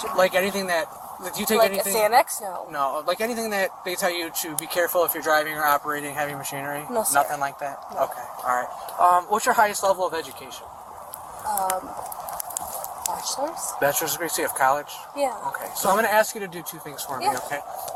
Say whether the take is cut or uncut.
uncut